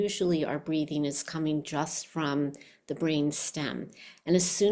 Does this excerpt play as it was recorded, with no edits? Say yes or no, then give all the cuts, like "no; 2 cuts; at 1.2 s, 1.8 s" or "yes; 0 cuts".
yes; 0 cuts